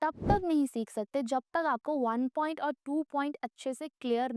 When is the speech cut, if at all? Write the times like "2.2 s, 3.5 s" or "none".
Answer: none

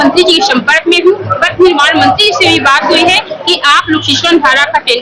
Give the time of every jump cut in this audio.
none

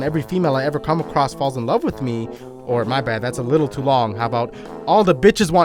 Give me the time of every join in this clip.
none

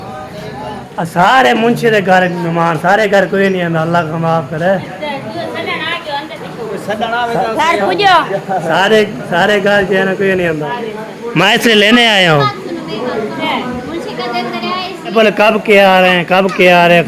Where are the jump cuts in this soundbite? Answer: 0.8 s, 6.4 s, 10.7 s, 15.1 s

